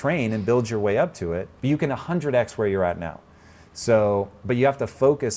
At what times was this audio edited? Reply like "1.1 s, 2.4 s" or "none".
1.5 s